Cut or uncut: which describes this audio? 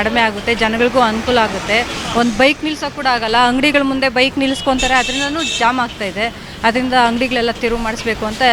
uncut